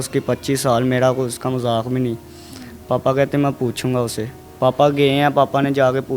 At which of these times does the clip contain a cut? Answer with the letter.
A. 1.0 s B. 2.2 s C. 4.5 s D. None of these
D